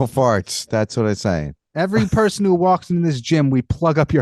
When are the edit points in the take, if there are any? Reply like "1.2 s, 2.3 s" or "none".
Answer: none